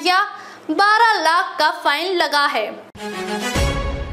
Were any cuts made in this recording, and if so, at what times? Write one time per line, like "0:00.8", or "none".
0:02.9